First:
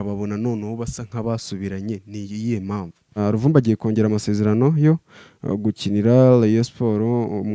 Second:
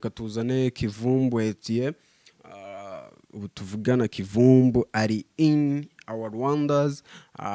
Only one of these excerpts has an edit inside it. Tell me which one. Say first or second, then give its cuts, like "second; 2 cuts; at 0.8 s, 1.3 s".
first; 1 cut; at 3.2 s